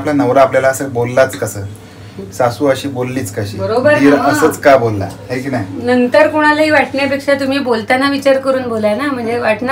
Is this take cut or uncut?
uncut